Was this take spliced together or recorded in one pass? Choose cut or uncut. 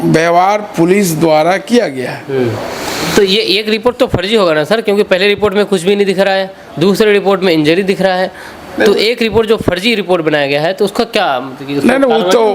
uncut